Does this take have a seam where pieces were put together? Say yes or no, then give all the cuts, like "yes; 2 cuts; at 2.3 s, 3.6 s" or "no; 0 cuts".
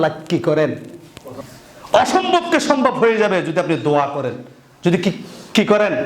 yes; 1 cut; at 1.3 s